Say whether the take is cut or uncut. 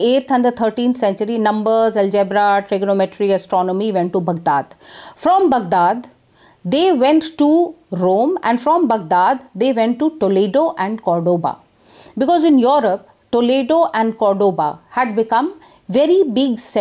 uncut